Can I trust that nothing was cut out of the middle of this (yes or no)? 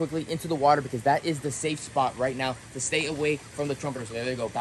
yes